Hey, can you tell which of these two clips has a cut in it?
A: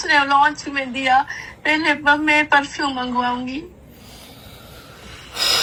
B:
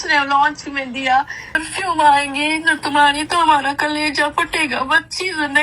B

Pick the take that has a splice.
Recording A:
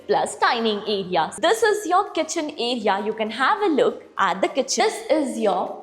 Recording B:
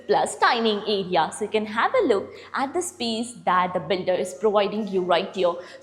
A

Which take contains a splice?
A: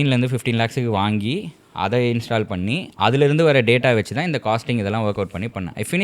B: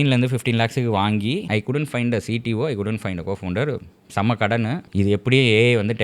B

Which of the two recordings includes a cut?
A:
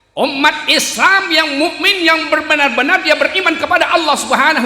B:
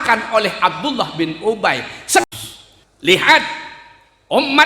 B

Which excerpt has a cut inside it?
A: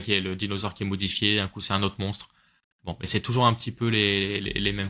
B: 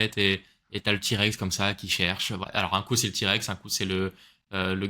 B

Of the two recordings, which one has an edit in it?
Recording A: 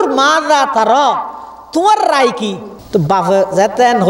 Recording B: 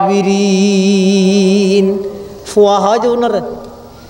A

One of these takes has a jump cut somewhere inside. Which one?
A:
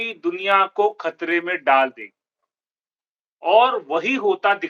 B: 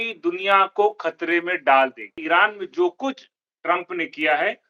B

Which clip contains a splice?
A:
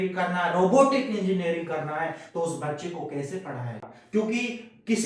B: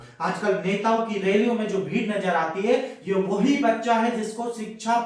A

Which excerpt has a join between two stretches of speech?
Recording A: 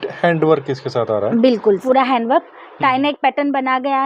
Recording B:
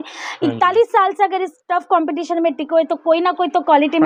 A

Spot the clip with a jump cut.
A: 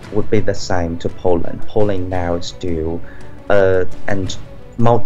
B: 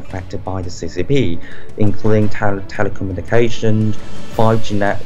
A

